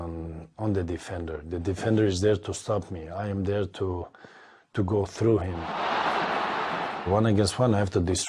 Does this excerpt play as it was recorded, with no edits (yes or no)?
yes